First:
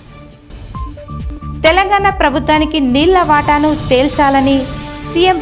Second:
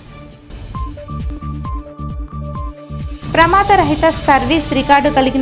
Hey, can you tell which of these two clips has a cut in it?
first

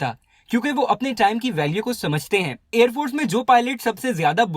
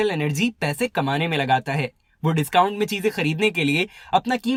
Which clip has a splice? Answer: first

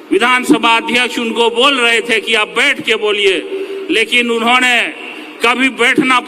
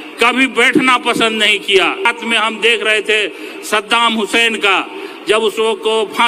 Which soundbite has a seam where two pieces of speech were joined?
second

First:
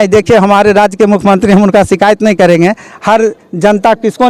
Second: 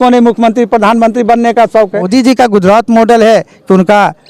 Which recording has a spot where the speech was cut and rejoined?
second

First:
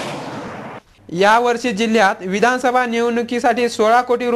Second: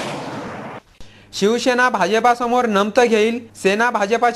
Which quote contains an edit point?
second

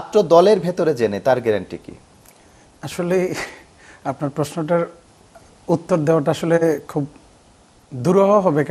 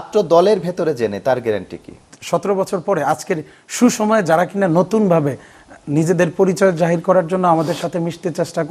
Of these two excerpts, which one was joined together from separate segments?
second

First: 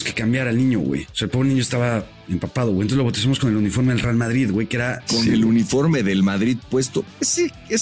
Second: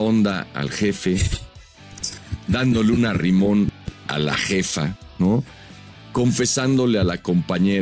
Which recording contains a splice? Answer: first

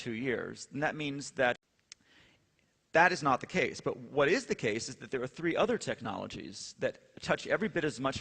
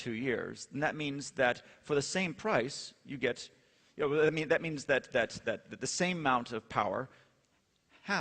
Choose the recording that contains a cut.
second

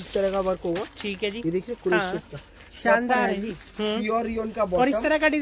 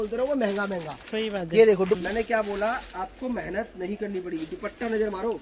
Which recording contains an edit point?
second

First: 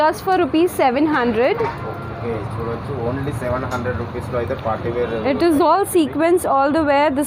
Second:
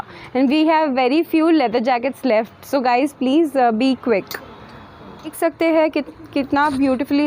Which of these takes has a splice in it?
second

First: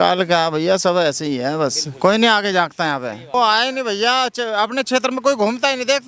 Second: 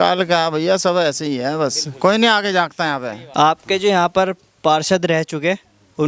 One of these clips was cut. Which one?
second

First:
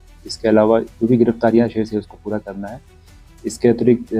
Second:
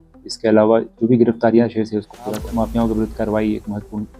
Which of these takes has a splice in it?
second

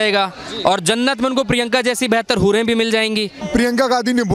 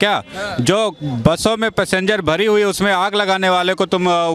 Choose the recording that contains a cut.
first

